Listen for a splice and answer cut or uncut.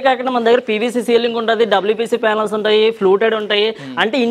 uncut